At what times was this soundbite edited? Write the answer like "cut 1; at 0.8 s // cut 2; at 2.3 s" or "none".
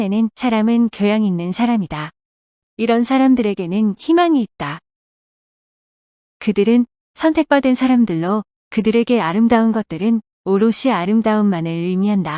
cut 1; at 11.0 s